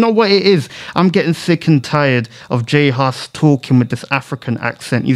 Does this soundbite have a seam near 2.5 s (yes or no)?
no